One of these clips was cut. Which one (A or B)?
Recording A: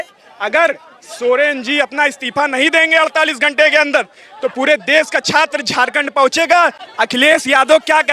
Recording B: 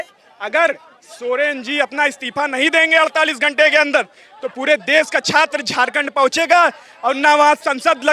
A